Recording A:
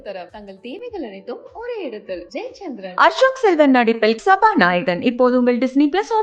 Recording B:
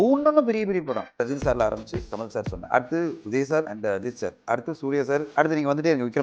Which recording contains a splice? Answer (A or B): B